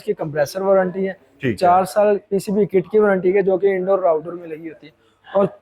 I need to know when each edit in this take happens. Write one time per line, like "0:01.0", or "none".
none